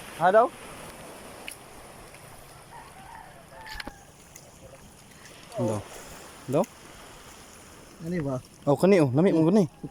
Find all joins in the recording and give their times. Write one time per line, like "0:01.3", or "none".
none